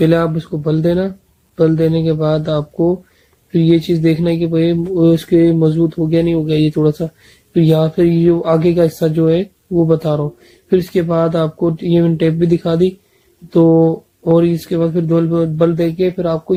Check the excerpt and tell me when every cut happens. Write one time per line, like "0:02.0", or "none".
none